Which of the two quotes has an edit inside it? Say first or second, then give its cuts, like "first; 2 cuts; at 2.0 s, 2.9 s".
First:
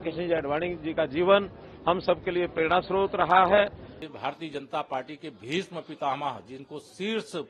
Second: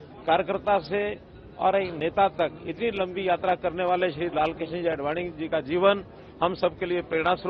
first; 1 cut; at 3.9 s